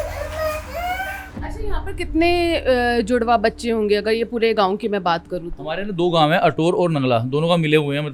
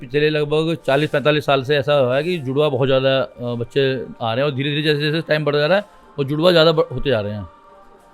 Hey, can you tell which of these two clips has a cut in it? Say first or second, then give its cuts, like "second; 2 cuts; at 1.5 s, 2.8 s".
first; 1 cut; at 1.4 s